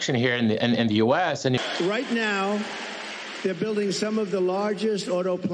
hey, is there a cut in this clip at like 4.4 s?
no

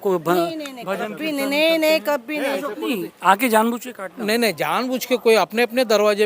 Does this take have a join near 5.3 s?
no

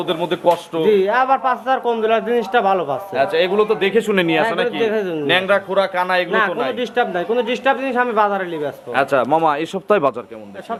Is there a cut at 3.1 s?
no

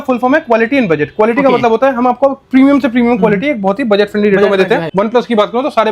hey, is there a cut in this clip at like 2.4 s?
no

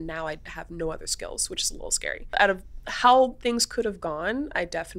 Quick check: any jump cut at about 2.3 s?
yes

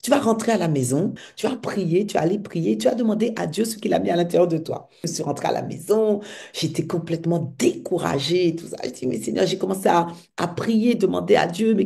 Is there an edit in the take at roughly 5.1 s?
yes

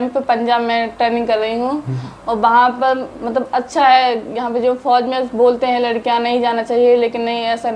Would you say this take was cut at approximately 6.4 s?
no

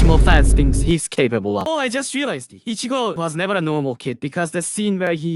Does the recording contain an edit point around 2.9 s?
no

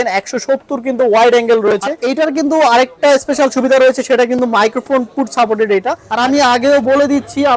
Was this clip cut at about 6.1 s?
yes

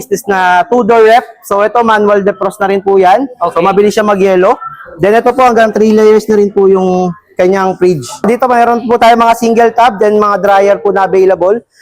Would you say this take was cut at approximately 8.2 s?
yes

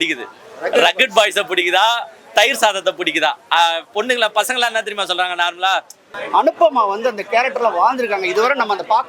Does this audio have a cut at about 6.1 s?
yes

